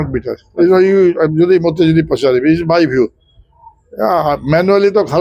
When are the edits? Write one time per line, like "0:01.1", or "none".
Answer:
none